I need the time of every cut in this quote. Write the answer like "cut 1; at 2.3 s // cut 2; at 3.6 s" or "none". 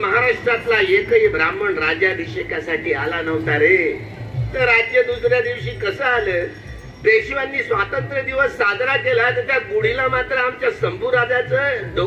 cut 1; at 4.5 s